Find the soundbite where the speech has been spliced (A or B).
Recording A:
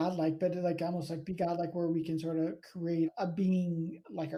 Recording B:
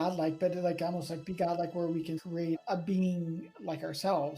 B